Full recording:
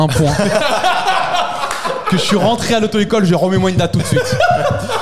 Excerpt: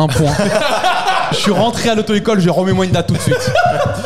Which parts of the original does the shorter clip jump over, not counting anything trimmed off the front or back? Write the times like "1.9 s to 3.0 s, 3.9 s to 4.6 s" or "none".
1.3 s to 2.2 s